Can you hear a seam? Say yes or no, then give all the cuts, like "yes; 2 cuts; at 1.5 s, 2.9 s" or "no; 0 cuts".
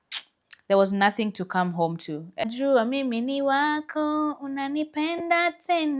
yes; 1 cut; at 2.4 s